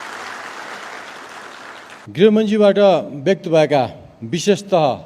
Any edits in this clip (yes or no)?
yes